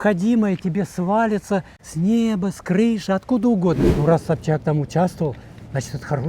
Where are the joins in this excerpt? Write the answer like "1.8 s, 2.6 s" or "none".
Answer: 1.8 s, 3.9 s